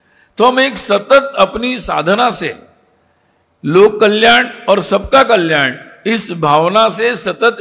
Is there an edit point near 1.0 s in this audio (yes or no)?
no